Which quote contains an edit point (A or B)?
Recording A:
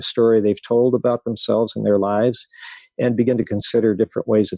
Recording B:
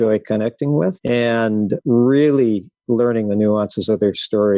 B